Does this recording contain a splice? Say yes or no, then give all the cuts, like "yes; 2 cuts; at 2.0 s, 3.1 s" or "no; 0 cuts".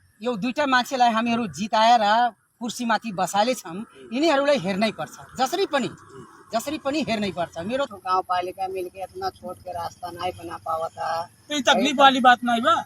yes; 1 cut; at 7.9 s